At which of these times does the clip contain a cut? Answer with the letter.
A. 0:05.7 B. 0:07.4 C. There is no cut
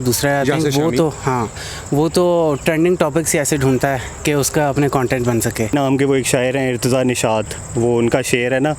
A